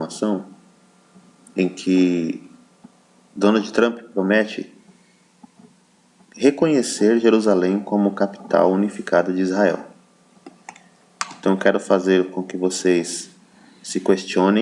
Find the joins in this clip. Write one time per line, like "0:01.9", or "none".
0:13.6